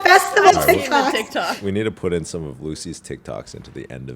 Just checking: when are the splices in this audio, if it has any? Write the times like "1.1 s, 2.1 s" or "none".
1.5 s